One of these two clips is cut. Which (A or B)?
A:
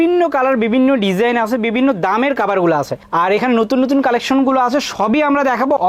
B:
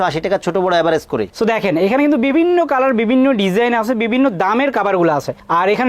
B